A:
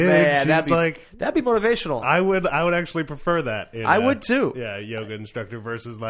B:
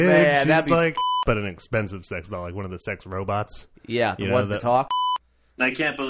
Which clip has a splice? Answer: B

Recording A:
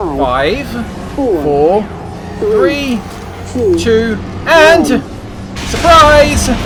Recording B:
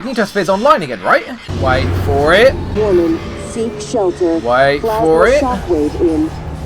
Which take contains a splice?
B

